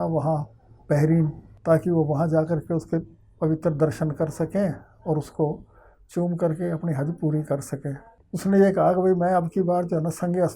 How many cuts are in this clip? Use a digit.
2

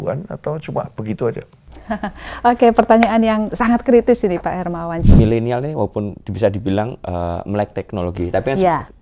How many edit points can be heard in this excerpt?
1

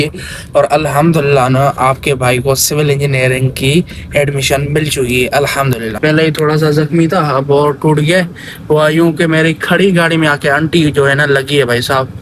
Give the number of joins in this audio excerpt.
1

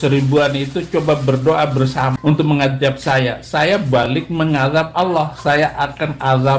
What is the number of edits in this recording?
1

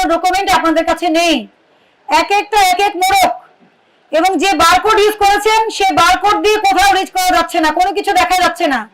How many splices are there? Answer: 0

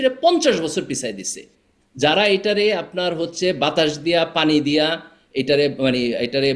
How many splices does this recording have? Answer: 0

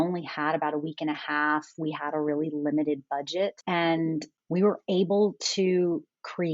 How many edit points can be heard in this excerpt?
2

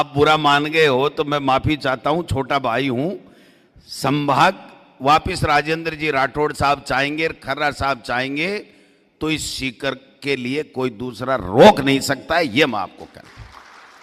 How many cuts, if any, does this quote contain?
0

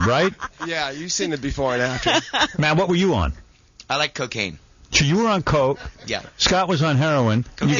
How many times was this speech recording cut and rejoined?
1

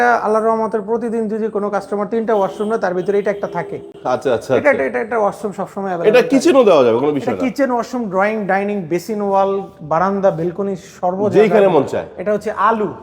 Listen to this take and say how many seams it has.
0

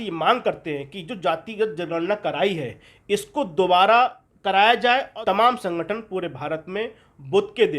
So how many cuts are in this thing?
2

